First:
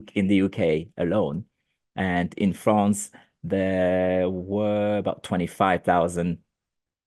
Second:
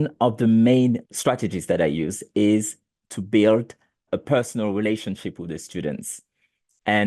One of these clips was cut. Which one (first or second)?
second